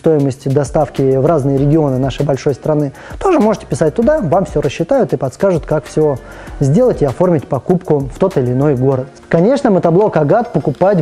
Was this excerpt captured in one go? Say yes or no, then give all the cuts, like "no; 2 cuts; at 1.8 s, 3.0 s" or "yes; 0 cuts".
no; 1 cut; at 9.1 s